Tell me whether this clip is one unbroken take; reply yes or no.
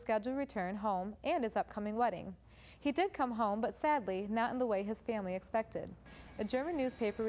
yes